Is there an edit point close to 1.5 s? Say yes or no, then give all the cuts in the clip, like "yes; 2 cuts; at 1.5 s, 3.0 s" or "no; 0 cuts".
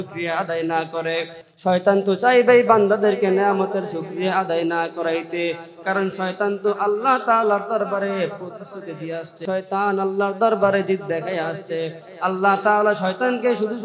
yes; 2 cuts; at 1.5 s, 9.4 s